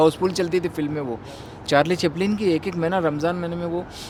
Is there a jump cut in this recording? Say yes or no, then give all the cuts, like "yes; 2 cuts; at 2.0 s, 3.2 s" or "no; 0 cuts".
no; 0 cuts